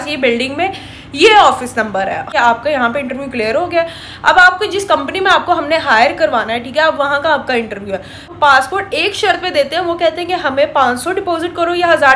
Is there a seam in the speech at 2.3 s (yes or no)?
yes